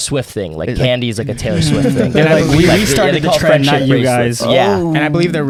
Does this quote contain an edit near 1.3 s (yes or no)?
no